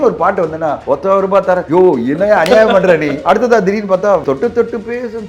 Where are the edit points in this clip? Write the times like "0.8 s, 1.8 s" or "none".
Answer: 0.8 s, 1.6 s, 3.2 s, 4.2 s